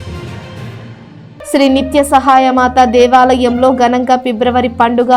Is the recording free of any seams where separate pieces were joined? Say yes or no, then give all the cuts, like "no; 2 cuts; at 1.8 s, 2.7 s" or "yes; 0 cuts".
yes; 0 cuts